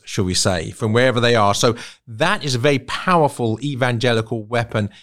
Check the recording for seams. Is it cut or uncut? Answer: uncut